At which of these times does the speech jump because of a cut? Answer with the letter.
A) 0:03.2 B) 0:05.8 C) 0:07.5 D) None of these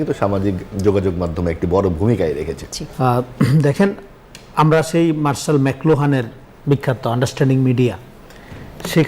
A